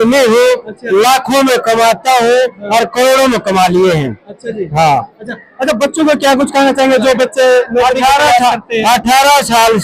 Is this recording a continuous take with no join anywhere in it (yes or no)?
yes